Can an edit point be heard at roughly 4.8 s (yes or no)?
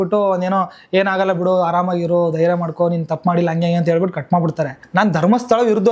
yes